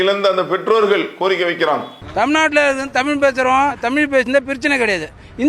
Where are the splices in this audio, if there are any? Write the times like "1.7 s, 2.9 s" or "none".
none

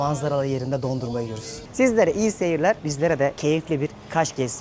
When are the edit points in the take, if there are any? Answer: 1.6 s, 3.4 s

